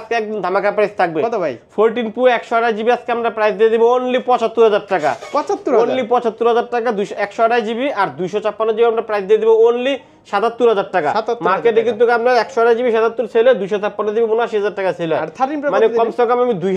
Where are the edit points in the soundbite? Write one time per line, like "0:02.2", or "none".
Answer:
none